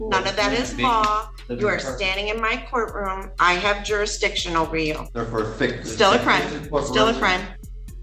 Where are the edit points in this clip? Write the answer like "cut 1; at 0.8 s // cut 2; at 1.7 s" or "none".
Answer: cut 1; at 5.1 s